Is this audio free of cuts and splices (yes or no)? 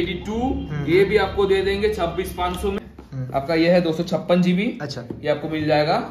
no